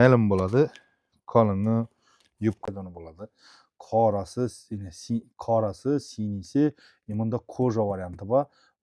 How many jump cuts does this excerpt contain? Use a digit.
1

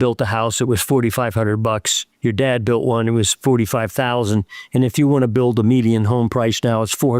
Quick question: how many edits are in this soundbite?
0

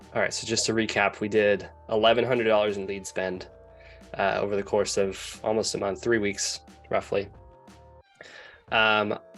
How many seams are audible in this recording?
0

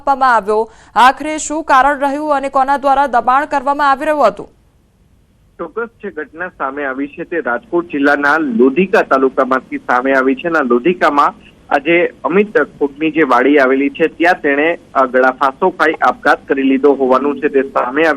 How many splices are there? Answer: 1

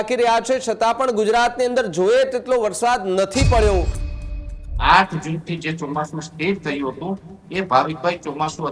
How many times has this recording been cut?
1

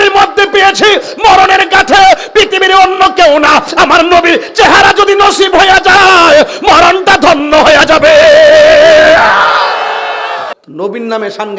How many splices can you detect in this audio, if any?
1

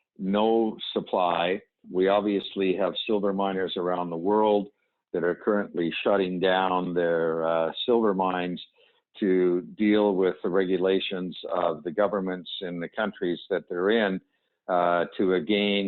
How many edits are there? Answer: 1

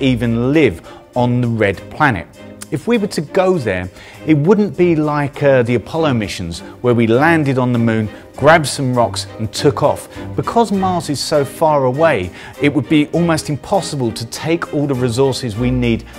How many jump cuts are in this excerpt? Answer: 1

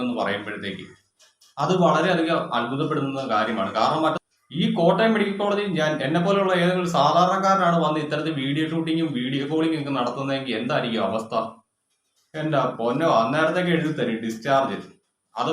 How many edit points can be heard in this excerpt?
1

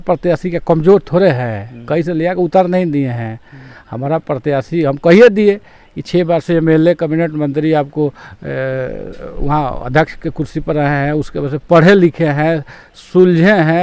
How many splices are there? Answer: 0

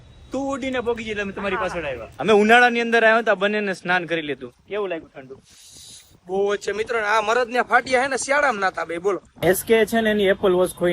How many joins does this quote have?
2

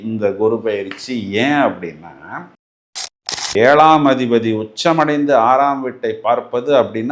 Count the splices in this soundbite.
1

